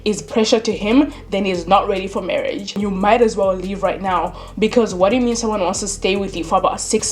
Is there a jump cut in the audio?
no; 0 cuts

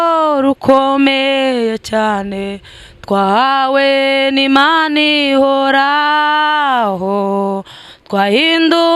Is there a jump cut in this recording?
no; 0 cuts

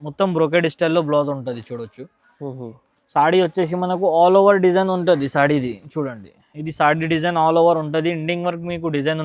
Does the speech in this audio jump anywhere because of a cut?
no; 0 cuts

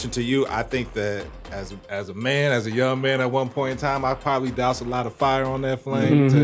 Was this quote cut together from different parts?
no; 0 cuts

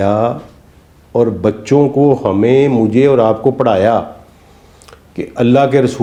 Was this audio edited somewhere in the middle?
no; 0 cuts

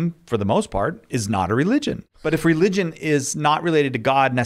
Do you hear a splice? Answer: yes; 1 cut; at 2.1 s

